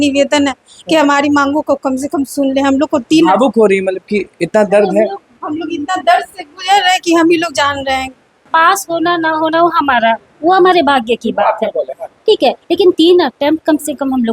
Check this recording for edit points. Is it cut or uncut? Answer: cut